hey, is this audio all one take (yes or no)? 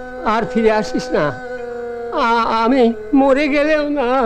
yes